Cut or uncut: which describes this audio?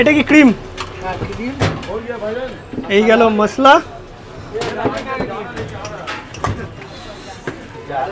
uncut